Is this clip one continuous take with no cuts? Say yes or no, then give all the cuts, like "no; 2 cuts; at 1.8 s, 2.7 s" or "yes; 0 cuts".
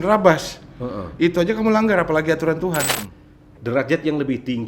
no; 1 cut; at 2.9 s